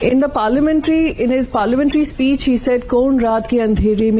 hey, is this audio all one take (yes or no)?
yes